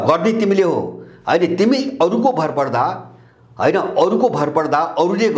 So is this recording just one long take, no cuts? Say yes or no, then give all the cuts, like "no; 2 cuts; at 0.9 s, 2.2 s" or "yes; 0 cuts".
yes; 0 cuts